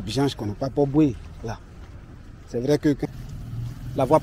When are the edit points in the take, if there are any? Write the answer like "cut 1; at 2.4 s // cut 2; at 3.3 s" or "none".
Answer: cut 1; at 3.0 s